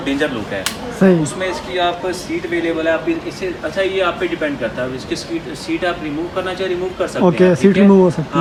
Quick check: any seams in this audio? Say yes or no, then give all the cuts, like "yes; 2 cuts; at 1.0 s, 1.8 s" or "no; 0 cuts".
no; 0 cuts